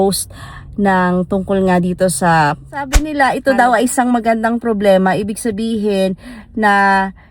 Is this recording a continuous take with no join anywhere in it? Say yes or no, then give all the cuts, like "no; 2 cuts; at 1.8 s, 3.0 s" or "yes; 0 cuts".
no; 1 cut; at 3.0 s